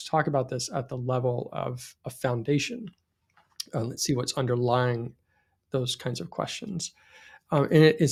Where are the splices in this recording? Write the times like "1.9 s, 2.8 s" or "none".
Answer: none